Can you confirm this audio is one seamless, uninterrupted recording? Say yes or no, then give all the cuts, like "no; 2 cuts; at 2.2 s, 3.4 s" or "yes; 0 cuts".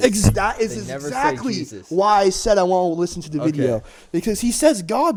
yes; 0 cuts